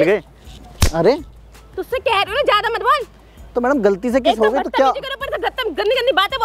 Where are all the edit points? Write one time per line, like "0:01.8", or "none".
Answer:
none